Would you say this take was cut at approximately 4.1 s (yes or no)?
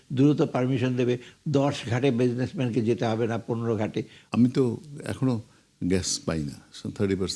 yes